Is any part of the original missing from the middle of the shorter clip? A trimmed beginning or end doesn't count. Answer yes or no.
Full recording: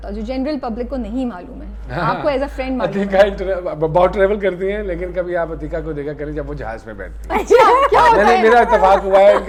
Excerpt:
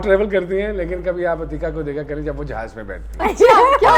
no